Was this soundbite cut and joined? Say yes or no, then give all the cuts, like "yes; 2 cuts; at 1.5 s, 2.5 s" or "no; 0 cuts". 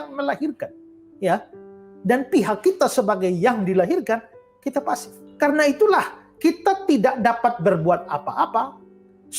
yes; 1 cut; at 5.2 s